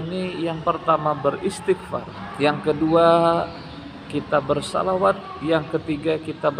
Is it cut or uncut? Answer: cut